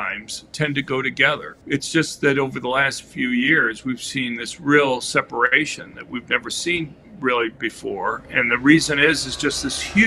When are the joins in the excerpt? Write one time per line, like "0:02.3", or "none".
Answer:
0:01.5